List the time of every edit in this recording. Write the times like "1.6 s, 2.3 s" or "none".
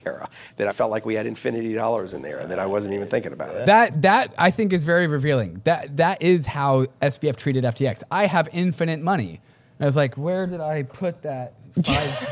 3.6 s

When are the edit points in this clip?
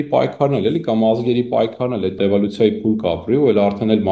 2.2 s

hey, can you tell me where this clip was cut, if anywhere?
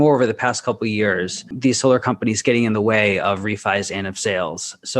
1.5 s

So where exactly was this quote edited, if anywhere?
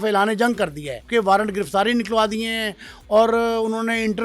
1.1 s

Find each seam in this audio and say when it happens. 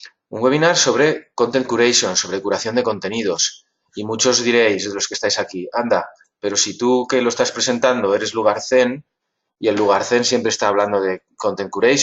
7.1 s

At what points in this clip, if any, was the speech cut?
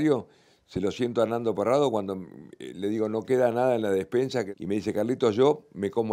4.5 s

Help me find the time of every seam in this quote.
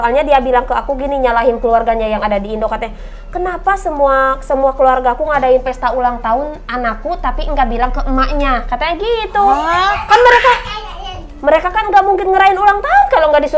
none

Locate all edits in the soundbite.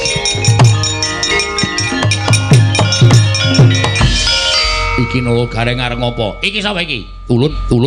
none

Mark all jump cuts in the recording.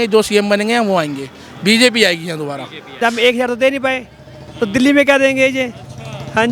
2.9 s

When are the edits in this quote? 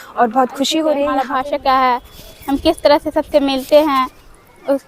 1.2 s

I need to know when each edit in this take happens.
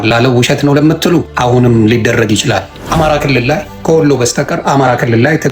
1.3 s, 2.8 s, 3.7 s

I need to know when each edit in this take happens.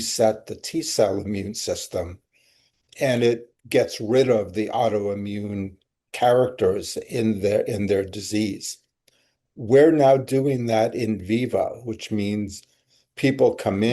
none

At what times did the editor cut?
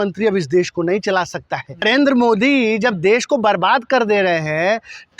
1.8 s

